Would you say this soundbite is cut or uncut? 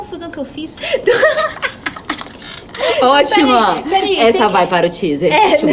uncut